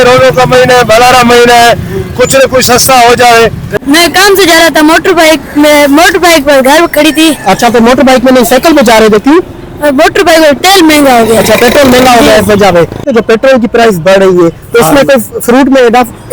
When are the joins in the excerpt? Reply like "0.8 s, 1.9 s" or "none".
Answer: 3.8 s, 13.1 s